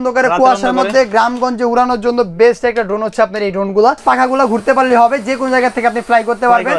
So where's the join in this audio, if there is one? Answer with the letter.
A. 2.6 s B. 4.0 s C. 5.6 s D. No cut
B